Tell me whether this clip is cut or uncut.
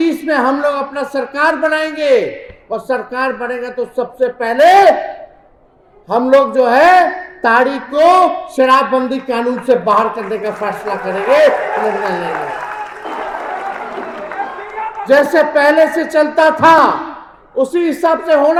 uncut